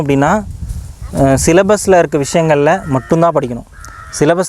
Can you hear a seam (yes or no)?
no